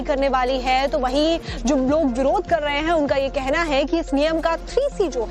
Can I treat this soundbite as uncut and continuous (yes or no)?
no